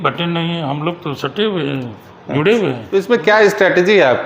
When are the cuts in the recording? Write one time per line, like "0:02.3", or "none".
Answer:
0:02.9